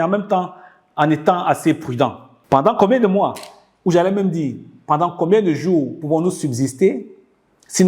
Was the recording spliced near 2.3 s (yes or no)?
yes